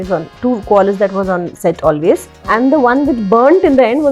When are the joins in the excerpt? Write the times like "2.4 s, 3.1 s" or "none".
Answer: 2.3 s